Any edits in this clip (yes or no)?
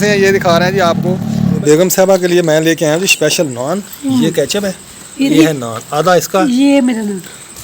yes